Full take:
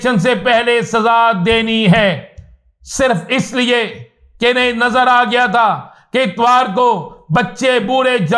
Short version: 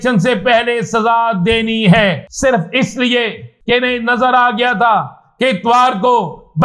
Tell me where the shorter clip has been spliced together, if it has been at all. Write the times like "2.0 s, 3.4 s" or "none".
2.3 s, 3.5 s